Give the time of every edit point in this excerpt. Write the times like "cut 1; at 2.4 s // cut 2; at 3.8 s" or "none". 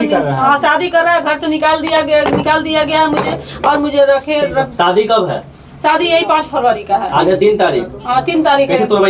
none